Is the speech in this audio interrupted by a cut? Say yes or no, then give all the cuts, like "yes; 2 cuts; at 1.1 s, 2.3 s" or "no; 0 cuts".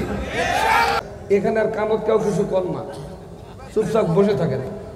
yes; 1 cut; at 1.0 s